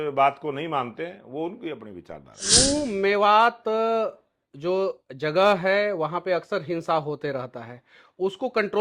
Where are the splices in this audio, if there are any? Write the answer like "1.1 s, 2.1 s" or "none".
2.5 s